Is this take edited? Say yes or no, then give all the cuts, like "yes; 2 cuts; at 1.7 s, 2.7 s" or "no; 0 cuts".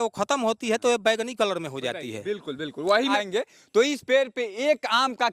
yes; 1 cut; at 3.1 s